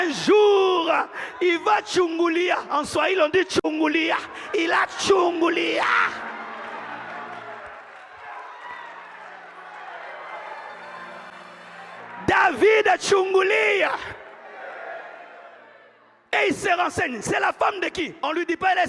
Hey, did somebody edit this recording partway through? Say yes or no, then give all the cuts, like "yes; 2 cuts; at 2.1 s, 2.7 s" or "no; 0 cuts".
no; 0 cuts